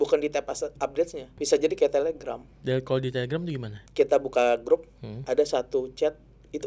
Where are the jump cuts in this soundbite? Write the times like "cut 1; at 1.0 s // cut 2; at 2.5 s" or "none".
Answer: cut 1; at 1.3 s // cut 2; at 2.5 s // cut 3; at 3.7 s